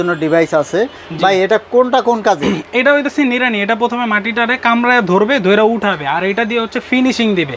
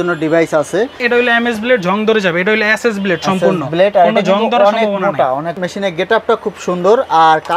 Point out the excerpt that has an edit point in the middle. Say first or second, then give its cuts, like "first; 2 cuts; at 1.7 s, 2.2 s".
second; 2 cuts; at 1.0 s, 5.6 s